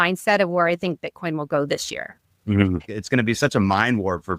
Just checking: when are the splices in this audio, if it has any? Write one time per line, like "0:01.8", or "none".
0:02.8